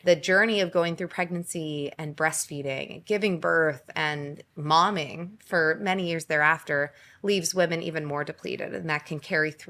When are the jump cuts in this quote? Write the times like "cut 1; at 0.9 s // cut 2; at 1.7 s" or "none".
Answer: none